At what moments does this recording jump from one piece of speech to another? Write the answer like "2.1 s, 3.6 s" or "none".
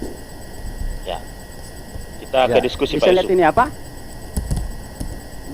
none